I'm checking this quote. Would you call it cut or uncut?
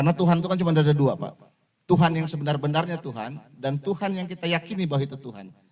uncut